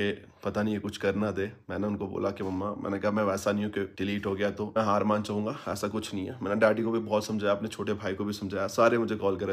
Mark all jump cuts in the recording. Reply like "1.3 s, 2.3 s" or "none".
none